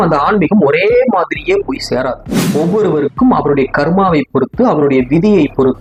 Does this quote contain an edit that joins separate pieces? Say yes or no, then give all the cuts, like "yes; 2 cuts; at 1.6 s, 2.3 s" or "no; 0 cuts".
no; 0 cuts